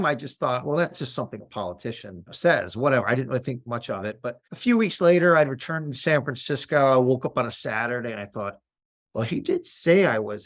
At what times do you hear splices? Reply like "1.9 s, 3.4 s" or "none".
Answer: 1.0 s, 2.4 s, 4.5 s